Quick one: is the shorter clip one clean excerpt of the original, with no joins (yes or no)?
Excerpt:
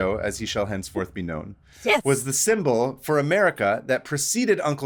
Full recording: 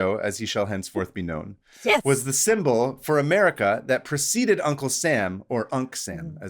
yes